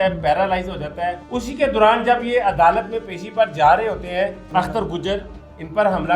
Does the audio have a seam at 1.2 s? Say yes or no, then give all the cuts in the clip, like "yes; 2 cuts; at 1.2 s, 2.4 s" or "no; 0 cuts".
yes; 2 cuts; at 1.2 s, 4.5 s